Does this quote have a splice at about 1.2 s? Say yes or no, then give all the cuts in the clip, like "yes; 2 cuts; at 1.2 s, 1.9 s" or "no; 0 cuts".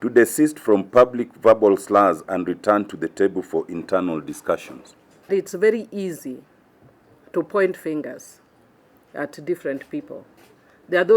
no; 1 cut; at 5.3 s